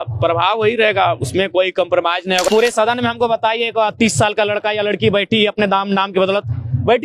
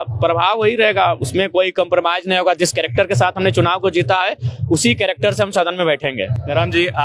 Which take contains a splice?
first; 1 cut; at 2.5 s

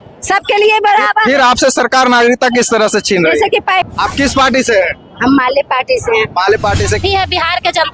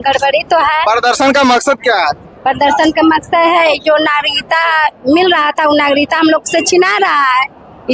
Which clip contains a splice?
first; 2 cuts; at 3.8 s, 7.0 s

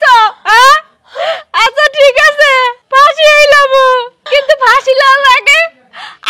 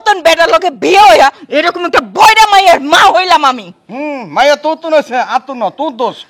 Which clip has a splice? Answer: first; 2 cuts; at 2.8 s, 4.2 s

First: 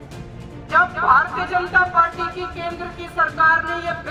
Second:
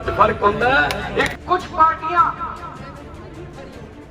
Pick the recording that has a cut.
second; 1 cut; at 1.3 s

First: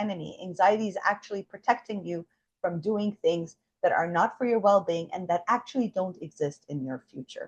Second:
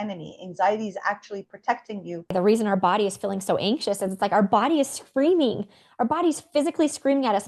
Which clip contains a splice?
second; 1 cut; at 2.3 s

